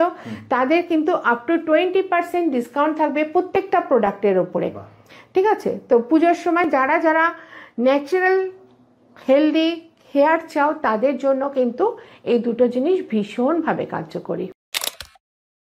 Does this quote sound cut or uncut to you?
uncut